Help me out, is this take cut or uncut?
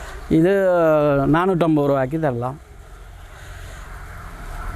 uncut